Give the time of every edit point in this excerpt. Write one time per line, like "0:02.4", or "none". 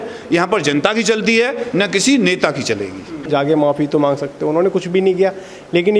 0:03.1